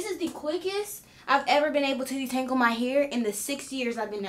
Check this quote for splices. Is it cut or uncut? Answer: uncut